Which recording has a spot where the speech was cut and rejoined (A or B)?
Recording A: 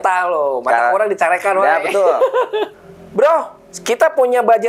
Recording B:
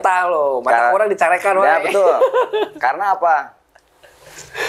A